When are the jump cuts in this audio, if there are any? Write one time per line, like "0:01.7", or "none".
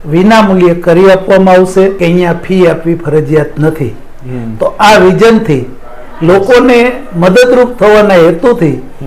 0:02.0